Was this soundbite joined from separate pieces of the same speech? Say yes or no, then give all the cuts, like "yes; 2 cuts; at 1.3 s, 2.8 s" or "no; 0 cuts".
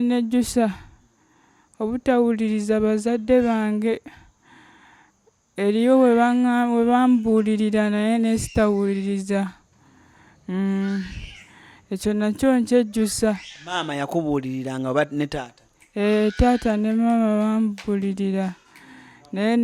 no; 0 cuts